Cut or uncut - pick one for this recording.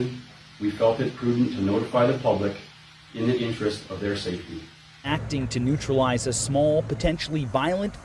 cut